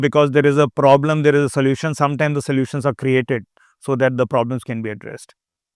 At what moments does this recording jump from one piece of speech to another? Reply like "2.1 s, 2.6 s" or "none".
none